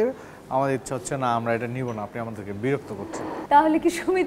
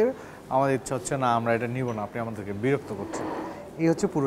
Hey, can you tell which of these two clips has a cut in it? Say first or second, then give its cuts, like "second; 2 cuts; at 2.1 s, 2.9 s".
first; 1 cut; at 3.3 s